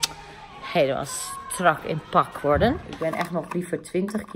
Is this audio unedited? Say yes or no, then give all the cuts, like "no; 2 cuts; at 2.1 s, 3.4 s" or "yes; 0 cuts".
no; 1 cut; at 2.9 s